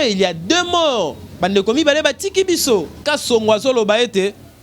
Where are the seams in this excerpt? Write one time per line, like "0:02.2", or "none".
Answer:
0:03.0